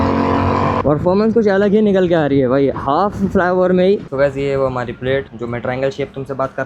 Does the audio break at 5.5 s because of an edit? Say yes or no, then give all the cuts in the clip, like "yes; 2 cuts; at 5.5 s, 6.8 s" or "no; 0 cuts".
no; 2 cuts; at 0.8 s, 4.0 s